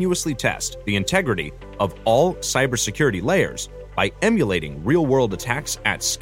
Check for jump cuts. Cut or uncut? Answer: uncut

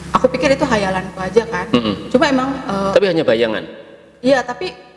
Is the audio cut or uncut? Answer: uncut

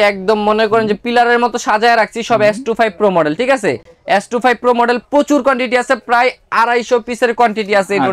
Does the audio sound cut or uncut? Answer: uncut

